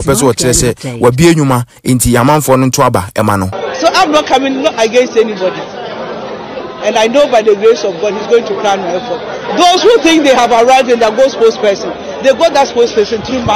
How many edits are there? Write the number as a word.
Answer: one